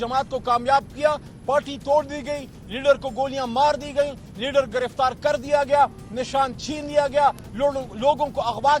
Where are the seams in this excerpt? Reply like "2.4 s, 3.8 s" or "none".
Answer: 1.3 s